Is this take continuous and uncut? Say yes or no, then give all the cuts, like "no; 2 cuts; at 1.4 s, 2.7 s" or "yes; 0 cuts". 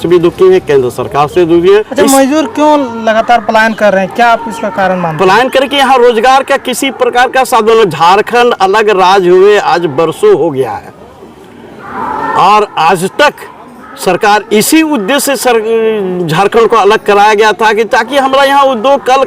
no; 1 cut; at 1.9 s